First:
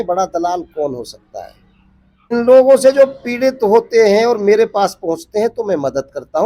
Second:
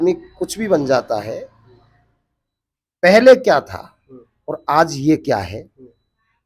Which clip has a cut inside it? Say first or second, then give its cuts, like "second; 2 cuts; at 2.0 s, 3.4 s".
first; 1 cut; at 2.3 s